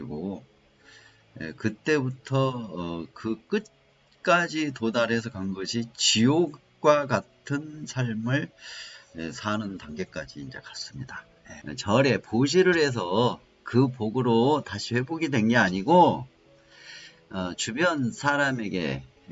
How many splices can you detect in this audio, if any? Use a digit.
1